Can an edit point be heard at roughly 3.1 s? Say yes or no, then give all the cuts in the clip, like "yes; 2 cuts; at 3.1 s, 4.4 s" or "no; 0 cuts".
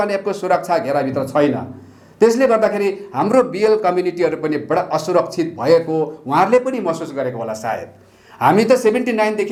no; 0 cuts